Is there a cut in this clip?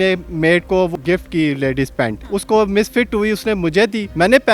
yes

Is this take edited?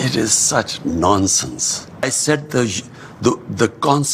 yes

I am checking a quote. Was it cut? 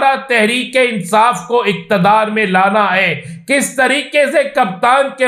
no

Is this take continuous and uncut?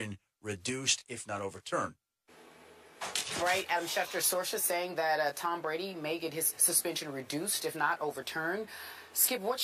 no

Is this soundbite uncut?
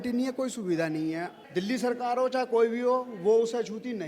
no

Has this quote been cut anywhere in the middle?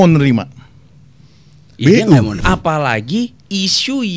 yes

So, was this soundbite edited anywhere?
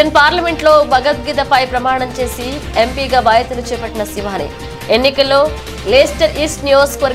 no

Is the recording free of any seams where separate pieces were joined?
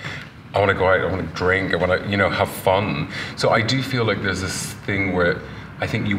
yes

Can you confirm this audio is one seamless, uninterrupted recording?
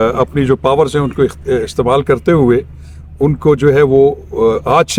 yes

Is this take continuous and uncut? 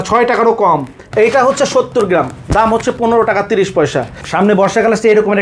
no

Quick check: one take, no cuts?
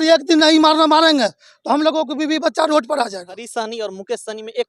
no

